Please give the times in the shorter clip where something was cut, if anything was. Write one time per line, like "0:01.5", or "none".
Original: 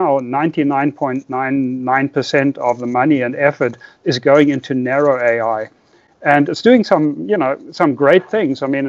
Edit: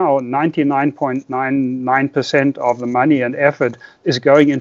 none